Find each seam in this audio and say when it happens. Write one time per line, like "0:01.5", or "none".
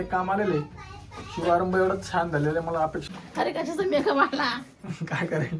0:03.1

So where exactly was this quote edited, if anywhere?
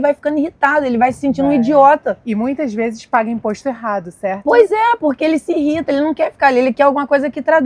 none

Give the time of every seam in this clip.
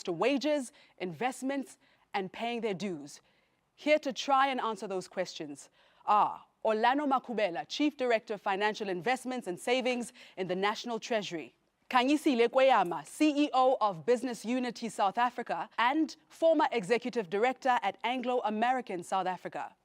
0:13.4

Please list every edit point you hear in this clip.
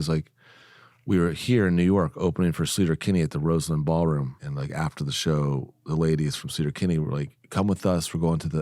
0:04.4

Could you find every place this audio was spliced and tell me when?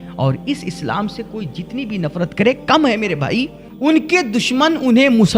0:03.6

